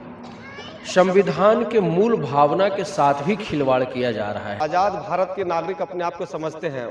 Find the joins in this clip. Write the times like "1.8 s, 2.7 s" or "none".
4.6 s